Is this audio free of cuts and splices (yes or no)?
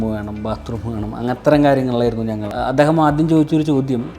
no